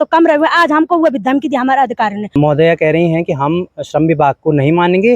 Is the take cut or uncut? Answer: cut